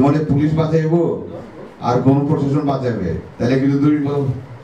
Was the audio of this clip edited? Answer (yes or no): no